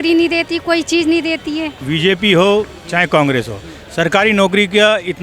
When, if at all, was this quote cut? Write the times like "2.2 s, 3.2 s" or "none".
1.8 s